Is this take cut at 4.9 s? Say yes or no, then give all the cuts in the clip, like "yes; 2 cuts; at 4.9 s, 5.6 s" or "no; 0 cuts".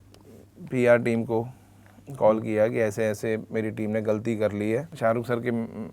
yes; 1 cut; at 4.9 s